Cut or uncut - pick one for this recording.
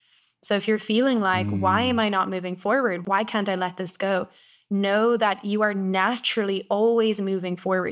cut